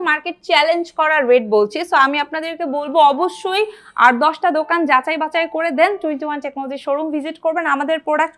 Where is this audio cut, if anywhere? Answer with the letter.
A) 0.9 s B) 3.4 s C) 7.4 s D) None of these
D